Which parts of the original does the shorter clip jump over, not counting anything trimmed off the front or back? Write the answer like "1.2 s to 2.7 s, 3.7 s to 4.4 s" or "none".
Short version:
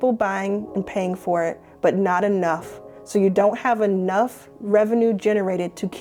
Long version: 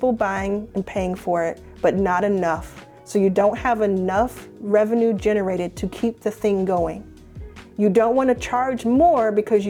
none